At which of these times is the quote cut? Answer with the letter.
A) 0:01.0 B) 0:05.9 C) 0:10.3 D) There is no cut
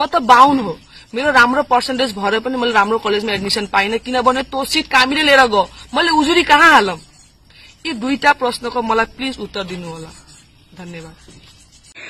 D